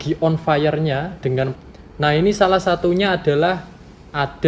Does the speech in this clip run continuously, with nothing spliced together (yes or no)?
no